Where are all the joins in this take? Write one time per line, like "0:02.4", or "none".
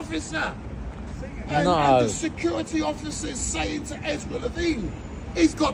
none